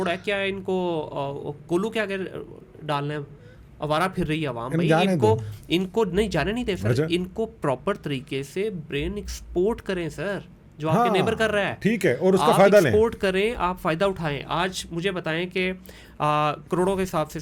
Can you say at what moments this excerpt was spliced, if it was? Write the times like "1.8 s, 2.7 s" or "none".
none